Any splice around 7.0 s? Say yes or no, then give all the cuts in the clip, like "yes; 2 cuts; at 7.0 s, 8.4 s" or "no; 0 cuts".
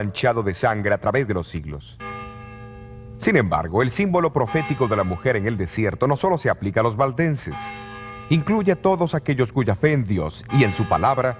no; 1 cut; at 1.3 s